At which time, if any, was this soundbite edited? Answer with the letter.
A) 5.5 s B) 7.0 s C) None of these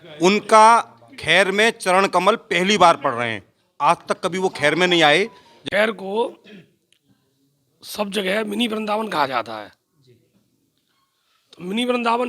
A